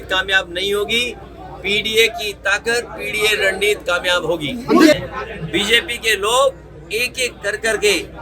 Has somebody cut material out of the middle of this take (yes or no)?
yes